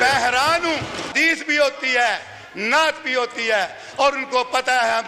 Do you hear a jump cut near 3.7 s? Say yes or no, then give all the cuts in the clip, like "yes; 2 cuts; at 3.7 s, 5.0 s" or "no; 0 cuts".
no; 1 cut; at 1.1 s